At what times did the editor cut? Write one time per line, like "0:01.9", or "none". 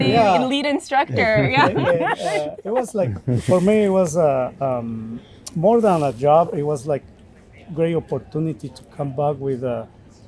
none